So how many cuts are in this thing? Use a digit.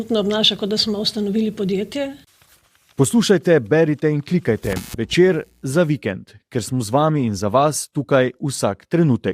1